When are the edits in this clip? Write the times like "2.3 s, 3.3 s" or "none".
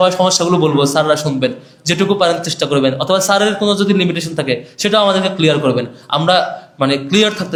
none